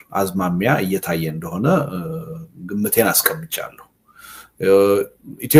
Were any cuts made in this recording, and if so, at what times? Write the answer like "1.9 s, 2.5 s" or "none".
none